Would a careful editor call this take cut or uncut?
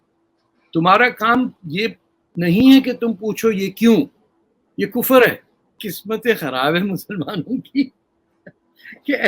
cut